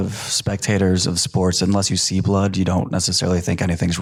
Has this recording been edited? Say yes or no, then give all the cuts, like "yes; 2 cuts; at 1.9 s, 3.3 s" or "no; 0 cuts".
no; 0 cuts